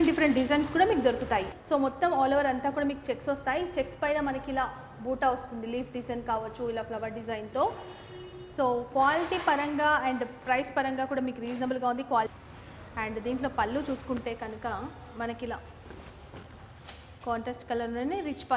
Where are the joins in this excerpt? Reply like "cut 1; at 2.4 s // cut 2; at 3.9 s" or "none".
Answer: cut 1; at 1.5 s // cut 2; at 12.3 s